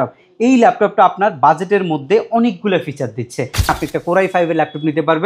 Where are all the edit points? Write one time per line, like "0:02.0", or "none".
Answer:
0:03.7